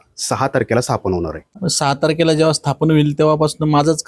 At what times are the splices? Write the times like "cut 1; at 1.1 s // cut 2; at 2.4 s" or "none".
cut 1; at 1.4 s